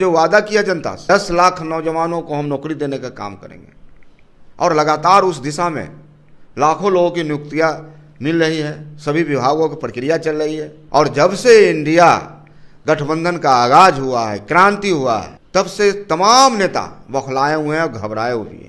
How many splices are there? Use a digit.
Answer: 3